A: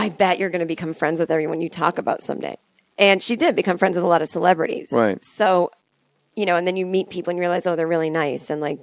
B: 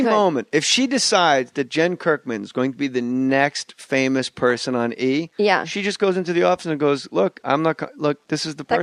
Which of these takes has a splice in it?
B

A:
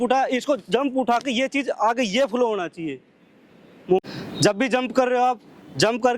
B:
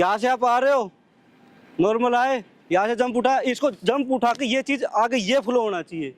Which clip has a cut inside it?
A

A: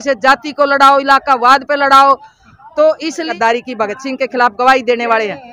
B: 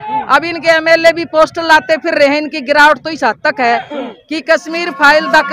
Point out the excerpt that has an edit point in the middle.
A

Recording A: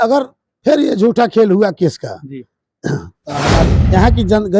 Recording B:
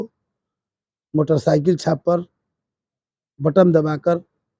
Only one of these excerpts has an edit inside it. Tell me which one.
A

